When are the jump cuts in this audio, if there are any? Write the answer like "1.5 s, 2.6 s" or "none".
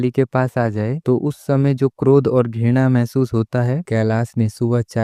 3.8 s